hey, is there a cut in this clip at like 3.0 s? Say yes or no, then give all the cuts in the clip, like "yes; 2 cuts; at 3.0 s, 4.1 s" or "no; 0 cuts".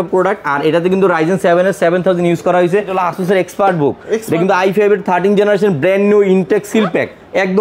yes; 1 cut; at 3.0 s